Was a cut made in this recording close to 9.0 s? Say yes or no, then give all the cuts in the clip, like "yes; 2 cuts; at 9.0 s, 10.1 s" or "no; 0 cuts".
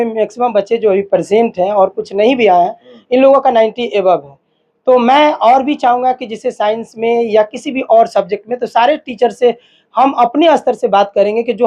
no; 0 cuts